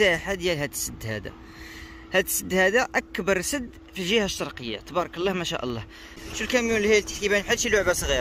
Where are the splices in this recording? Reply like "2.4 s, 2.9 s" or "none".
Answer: 6.2 s